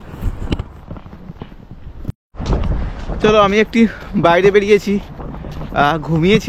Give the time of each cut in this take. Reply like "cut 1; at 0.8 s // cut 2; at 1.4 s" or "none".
cut 1; at 2.3 s